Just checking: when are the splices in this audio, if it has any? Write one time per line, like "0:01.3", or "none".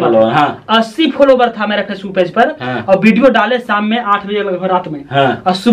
none